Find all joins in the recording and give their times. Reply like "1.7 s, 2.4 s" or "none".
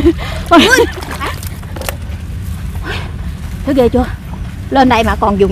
1.3 s